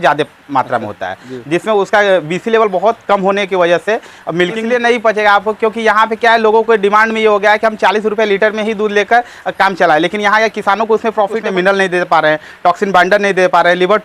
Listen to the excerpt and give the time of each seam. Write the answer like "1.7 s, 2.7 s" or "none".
4.6 s, 11.4 s